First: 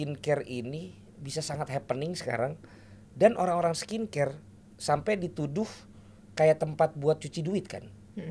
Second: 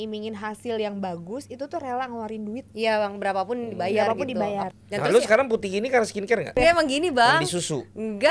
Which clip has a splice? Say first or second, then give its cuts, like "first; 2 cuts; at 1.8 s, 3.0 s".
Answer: second; 2 cuts; at 4.7 s, 6.6 s